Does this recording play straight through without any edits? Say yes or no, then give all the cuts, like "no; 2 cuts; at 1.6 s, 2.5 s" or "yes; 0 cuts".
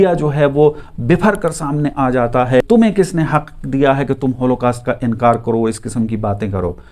no; 1 cut; at 2.6 s